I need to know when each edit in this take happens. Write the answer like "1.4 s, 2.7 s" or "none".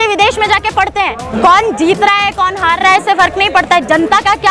1.3 s